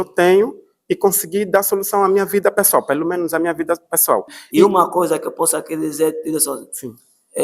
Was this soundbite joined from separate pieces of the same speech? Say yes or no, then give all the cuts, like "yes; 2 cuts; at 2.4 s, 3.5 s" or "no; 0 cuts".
yes; 1 cut; at 4.4 s